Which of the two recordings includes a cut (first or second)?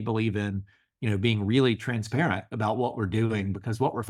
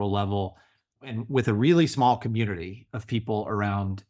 second